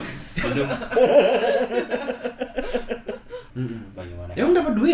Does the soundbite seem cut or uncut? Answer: cut